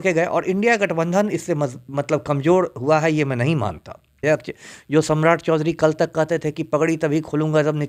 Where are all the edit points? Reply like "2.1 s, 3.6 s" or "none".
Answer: 4.2 s